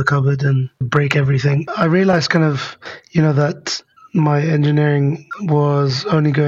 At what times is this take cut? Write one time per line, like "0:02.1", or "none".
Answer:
0:00.9
0:01.7